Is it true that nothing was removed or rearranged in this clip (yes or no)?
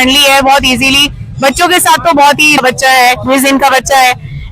no